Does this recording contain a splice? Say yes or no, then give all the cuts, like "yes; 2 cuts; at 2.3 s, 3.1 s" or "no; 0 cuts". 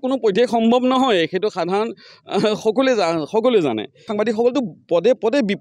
yes; 1 cut; at 4.0 s